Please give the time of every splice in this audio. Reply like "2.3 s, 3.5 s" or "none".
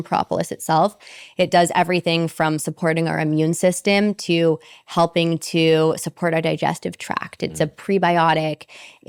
none